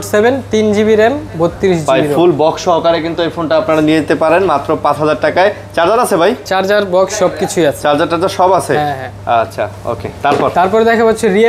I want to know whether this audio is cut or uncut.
uncut